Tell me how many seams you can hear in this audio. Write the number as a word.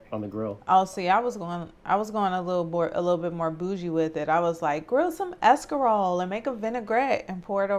zero